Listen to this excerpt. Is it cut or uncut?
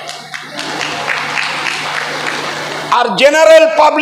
uncut